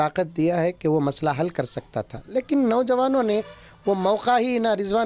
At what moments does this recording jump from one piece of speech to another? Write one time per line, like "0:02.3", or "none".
none